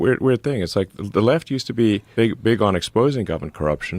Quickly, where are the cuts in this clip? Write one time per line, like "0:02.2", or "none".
0:02.1

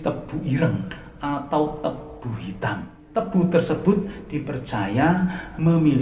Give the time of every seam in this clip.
0:03.0

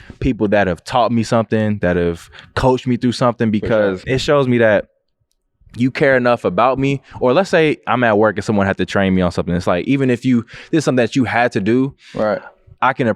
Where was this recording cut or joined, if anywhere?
0:04.0

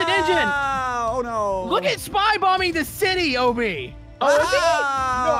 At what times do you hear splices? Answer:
none

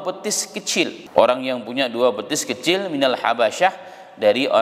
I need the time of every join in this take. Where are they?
0:01.0

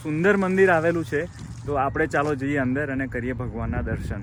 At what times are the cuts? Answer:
none

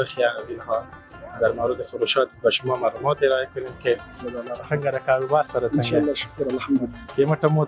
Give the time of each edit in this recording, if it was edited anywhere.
0:04.2

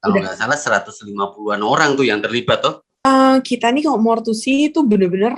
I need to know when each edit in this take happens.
0:03.0

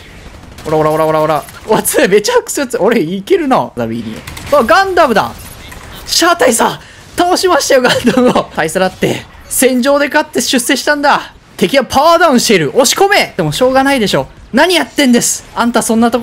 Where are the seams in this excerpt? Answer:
0:03.7
0:08.5
0:11.4
0:13.4

